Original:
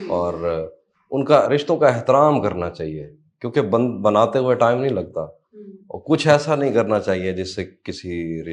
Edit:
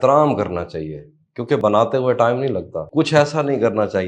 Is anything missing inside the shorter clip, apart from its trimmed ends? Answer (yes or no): yes